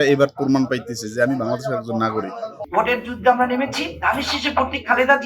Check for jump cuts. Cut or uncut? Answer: cut